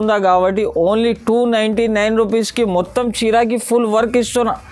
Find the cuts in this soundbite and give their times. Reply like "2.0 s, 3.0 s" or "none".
none